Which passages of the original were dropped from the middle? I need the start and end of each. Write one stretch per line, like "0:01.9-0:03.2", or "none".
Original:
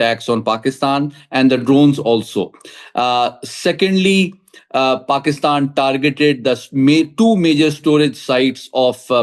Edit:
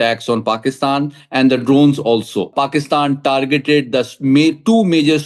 0:02.5-0:05.0